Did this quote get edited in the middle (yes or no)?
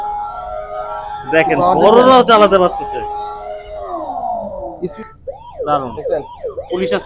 yes